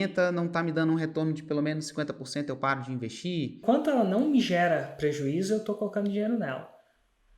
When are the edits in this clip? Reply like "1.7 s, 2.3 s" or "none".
3.6 s